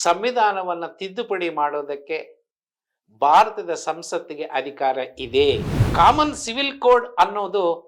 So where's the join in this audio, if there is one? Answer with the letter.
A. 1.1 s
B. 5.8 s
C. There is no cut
B